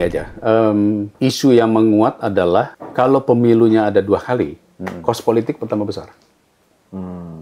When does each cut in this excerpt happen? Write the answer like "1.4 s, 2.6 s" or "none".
1.1 s, 2.8 s